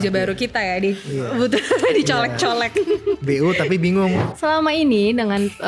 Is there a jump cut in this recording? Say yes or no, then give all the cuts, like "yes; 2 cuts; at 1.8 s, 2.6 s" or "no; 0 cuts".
yes; 1 cut; at 4.3 s